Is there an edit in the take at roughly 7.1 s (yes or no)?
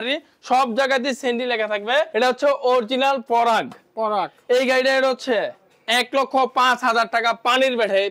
no